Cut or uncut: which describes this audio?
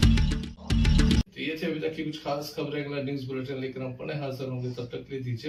uncut